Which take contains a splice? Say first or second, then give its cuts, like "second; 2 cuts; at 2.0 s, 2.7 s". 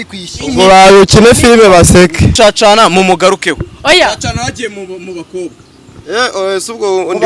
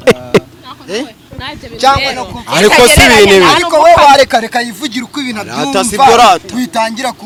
first; 1 cut; at 2.3 s